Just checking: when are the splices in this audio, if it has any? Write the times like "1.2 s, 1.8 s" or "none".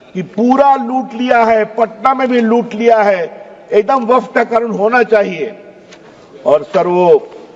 none